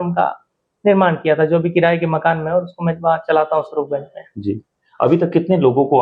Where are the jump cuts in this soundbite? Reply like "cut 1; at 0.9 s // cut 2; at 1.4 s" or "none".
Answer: none